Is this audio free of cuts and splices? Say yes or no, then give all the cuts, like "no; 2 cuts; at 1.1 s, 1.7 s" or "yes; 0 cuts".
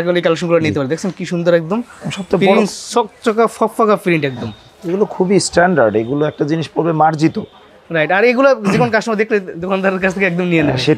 yes; 0 cuts